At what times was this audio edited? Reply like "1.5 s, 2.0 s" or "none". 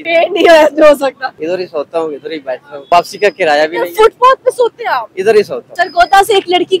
1.3 s, 2.7 s, 5.6 s